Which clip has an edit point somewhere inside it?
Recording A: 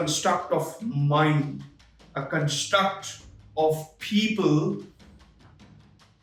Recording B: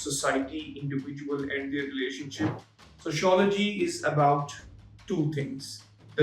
B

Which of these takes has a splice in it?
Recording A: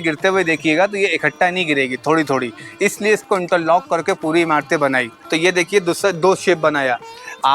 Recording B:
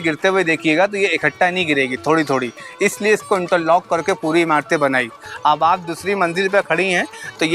A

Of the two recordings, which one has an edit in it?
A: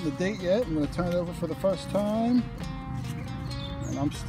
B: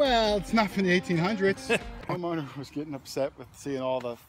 B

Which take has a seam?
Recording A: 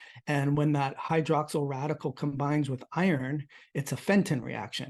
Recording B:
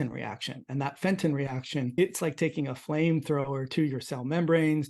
B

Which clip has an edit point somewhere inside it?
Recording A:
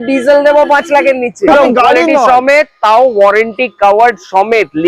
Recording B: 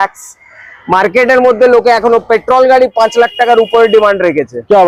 A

